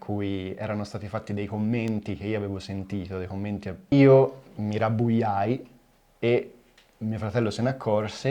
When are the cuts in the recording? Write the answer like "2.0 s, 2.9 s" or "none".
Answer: 3.8 s